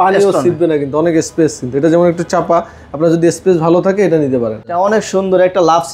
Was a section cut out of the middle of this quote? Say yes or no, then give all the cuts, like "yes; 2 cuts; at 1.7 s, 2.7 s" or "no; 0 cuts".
yes; 1 cut; at 4.7 s